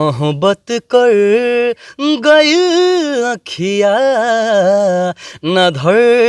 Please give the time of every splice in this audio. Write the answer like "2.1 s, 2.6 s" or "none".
none